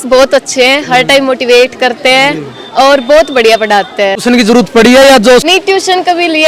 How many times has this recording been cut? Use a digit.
2